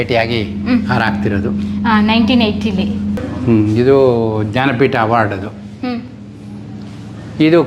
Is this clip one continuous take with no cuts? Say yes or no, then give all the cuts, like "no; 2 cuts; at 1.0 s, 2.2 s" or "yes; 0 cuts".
no; 1 cut; at 3.2 s